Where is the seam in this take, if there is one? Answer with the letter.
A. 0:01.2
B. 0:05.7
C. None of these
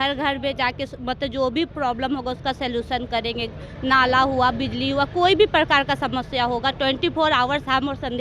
C